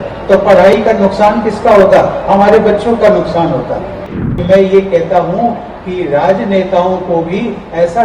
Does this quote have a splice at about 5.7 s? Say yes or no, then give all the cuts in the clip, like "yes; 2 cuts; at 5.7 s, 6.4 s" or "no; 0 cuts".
no; 1 cut; at 4.0 s